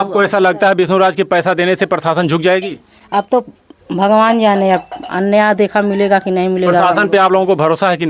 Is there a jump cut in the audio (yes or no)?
no